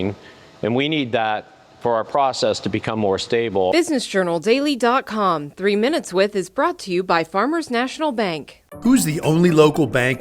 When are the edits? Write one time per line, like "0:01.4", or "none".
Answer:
0:03.7